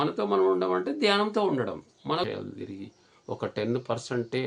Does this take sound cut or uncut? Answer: cut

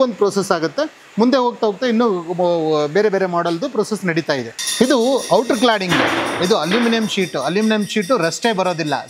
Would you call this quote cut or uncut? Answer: uncut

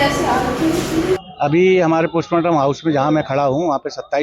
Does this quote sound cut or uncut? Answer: cut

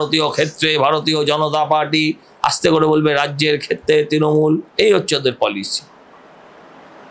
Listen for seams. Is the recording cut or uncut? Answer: uncut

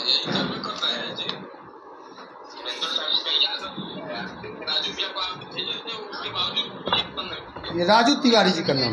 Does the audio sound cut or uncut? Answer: uncut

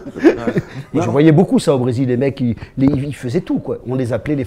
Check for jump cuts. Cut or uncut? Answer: cut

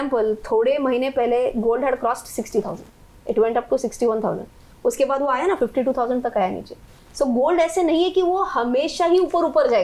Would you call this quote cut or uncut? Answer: uncut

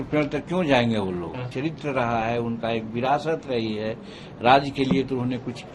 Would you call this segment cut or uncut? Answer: cut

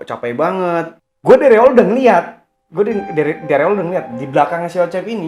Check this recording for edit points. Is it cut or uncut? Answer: cut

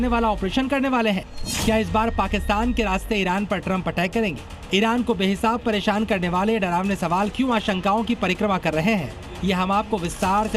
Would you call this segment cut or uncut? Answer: uncut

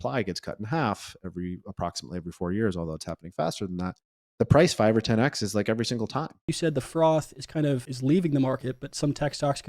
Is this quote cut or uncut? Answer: cut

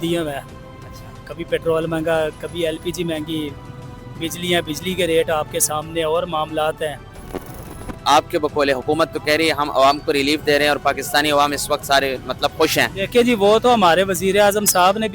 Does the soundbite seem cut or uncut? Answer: uncut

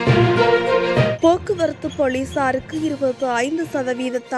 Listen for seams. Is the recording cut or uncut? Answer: cut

